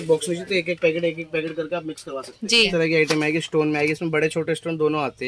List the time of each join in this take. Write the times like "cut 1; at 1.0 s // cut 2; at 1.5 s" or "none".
cut 1; at 2.7 s